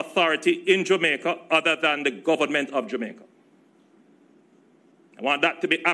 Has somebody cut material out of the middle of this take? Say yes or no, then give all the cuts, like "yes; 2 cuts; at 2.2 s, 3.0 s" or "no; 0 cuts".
no; 0 cuts